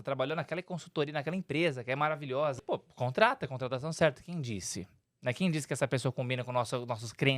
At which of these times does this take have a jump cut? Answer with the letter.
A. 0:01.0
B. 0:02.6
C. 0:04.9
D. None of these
B